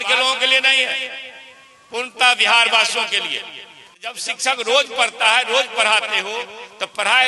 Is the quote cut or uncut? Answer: cut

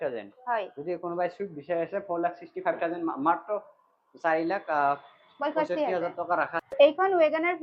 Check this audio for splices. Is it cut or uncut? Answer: cut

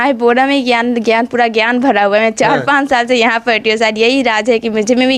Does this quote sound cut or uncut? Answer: uncut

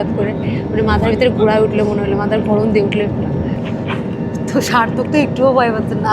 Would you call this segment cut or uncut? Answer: cut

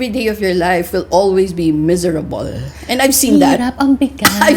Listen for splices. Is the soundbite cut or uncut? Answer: uncut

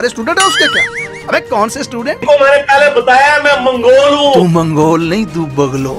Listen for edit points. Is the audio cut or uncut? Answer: cut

